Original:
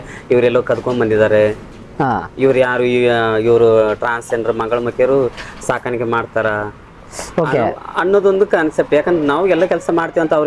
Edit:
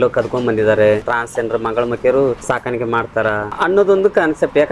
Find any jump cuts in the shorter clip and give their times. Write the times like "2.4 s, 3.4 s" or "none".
1.2 s, 2.4 s, 3.5 s